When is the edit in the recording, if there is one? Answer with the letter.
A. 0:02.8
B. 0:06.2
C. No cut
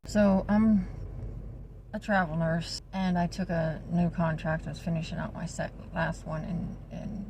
A